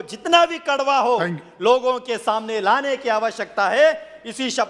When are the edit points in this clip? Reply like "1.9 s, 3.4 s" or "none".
none